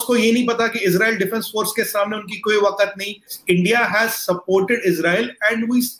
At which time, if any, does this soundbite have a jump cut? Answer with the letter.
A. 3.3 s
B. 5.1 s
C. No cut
A